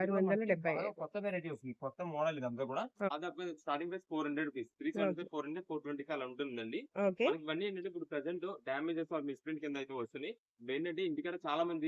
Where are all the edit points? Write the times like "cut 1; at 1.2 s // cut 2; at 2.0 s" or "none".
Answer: cut 1; at 3.1 s

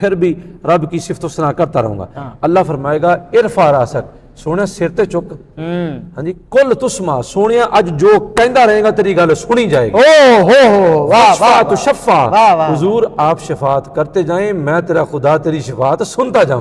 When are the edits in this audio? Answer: none

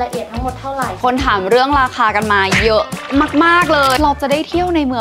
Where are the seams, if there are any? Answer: cut 1; at 1.0 s // cut 2; at 4.0 s

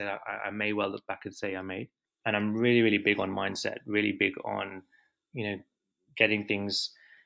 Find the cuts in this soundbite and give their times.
cut 1; at 2.0 s

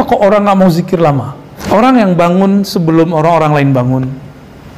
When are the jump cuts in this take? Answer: cut 1; at 1.5 s

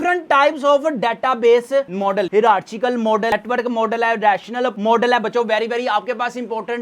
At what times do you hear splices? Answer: cut 1; at 2.3 s // cut 2; at 3.3 s

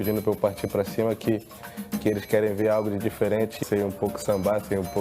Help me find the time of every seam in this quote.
cut 1; at 3.6 s

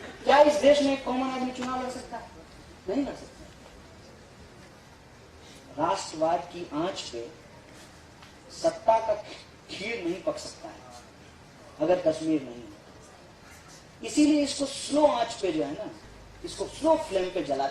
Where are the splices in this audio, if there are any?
cut 1; at 4.7 s

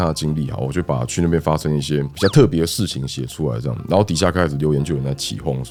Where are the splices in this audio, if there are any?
none

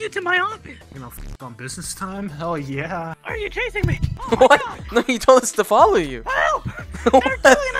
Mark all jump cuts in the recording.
cut 1; at 3.1 s

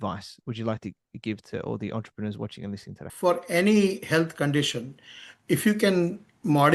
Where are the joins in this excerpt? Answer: cut 1; at 3.0 s

